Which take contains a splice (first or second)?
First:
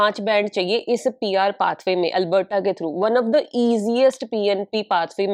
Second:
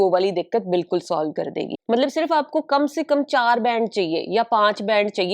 second